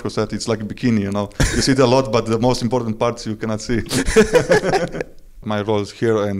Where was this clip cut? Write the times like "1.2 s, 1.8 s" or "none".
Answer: 5.4 s